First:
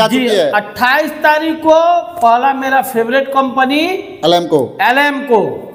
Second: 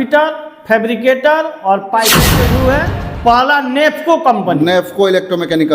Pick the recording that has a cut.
second; 1 cut; at 2.4 s

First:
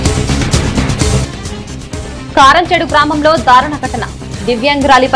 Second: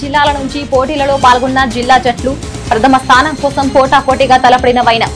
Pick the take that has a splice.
first; 1 cut; at 1.2 s

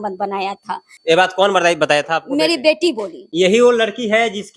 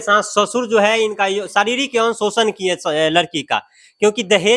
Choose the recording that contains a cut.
first; 2 cuts; at 0.9 s, 3.2 s

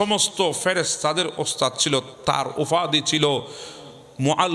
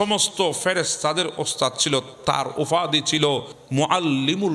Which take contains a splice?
second; 1 cut; at 3.6 s

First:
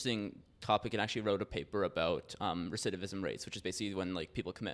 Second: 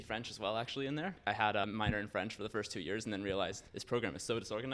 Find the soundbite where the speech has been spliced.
second; 2 cuts; at 1.3 s, 3.7 s

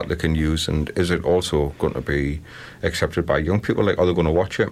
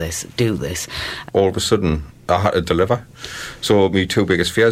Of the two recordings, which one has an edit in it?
second; 1 cut; at 1.1 s

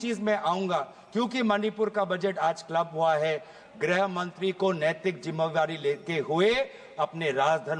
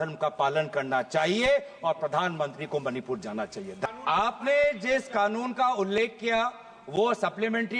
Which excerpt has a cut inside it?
second; 1 cut; at 3.8 s

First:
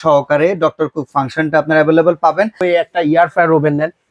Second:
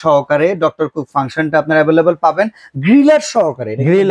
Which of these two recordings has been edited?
first; 1 cut; at 2.6 s

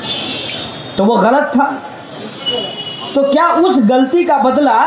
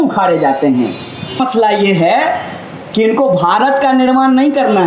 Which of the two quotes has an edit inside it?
second; 1 cut; at 1.4 s

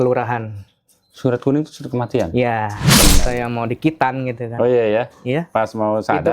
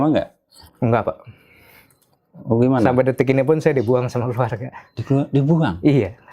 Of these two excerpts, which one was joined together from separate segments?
first; 1 cut; at 3.2 s

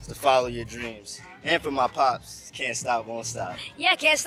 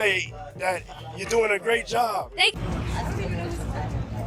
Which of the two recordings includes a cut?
second; 1 cut; at 2.5 s

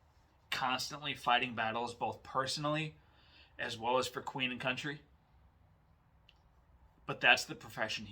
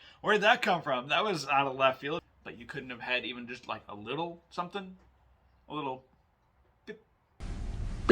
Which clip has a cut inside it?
second; 2 cuts; at 2.3 s, 7.2 s

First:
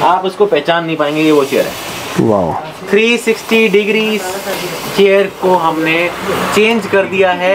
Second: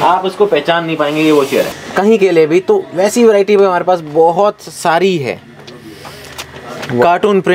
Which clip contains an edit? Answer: second; 1 cut; at 1.8 s

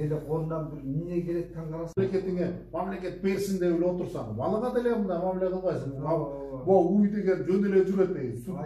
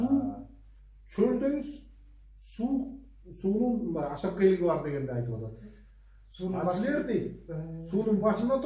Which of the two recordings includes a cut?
first; 1 cut; at 2.0 s

